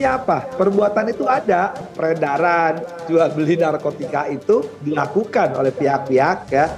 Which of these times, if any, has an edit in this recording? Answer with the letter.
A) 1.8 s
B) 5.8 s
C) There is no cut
A